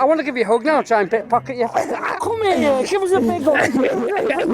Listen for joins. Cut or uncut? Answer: cut